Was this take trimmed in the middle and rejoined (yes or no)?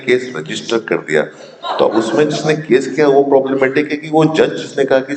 no